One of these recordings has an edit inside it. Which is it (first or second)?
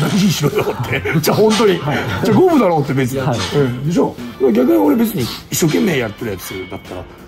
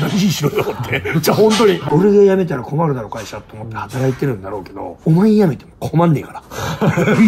second